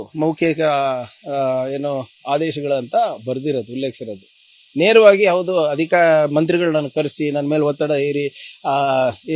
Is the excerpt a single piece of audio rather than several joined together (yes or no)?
yes